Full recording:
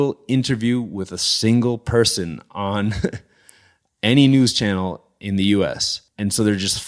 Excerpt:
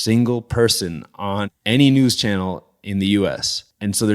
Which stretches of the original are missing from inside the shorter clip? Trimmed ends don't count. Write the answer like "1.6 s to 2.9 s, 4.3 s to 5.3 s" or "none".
2.8 s to 3.8 s